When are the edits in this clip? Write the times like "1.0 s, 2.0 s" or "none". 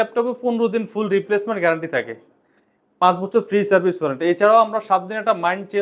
none